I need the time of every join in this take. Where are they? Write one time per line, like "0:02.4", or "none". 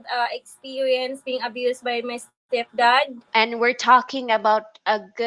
0:03.2